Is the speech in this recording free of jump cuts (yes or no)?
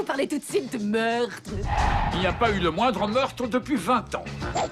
no